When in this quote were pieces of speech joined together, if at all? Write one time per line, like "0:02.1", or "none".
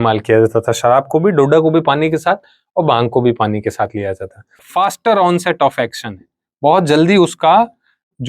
0:04.6